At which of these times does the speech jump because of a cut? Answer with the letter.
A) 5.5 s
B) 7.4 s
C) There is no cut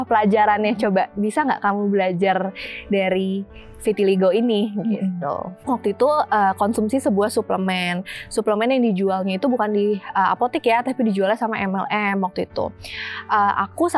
A